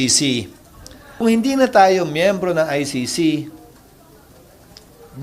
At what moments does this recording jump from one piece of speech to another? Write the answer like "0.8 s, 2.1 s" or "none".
1.2 s